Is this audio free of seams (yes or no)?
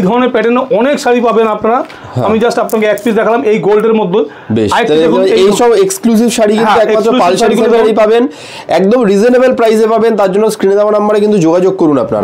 yes